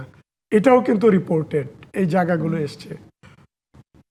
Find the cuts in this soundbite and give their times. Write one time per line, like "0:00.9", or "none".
none